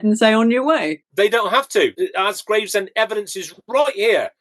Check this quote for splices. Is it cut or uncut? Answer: cut